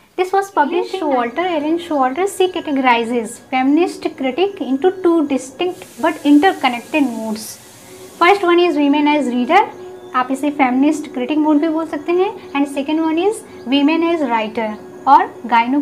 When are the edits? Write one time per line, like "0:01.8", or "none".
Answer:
0:00.9